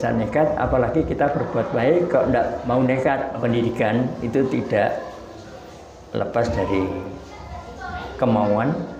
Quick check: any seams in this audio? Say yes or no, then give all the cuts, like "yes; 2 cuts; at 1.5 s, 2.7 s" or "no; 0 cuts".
yes; 1 cut; at 3.3 s